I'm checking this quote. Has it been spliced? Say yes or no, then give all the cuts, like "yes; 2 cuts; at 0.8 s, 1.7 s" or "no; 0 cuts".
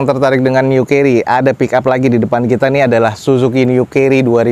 no; 0 cuts